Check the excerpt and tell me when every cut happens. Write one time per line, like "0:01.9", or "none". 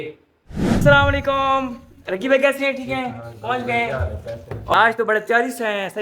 0:00.8
0:04.7